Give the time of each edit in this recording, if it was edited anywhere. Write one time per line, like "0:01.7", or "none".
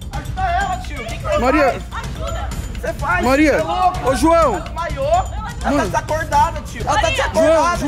0:06.8